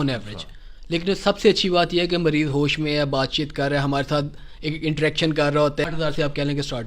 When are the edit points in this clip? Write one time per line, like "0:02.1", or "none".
0:05.9